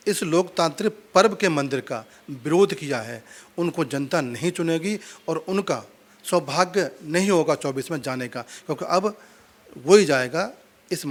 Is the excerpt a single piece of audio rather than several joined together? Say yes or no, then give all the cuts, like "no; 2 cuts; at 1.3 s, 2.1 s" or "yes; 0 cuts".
yes; 0 cuts